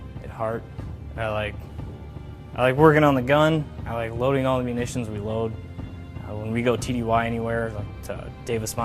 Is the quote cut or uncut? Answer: uncut